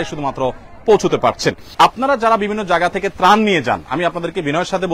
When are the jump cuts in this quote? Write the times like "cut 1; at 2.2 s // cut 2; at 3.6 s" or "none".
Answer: cut 1; at 1.7 s